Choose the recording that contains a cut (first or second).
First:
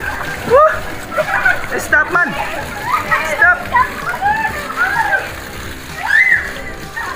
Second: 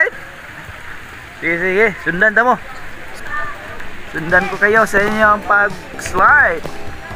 second